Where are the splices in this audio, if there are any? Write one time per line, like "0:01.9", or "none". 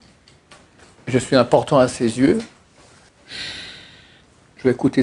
0:03.1